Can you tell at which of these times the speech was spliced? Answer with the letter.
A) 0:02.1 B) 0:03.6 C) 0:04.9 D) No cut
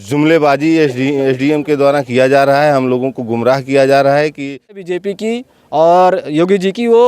C